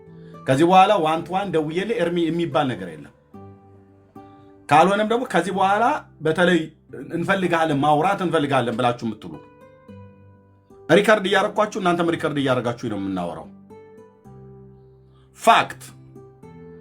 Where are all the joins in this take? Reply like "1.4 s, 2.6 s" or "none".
3.3 s, 4.7 s